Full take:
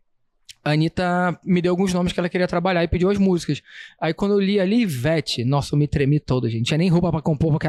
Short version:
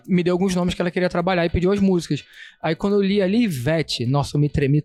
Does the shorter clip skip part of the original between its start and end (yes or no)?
no